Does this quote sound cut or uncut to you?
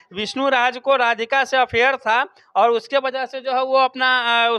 uncut